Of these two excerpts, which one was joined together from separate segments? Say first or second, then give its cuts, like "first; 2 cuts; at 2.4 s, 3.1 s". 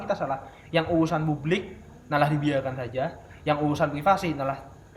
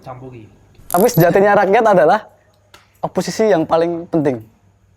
second; 1 cut; at 0.9 s